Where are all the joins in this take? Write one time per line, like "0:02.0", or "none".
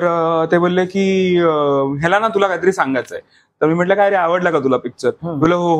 none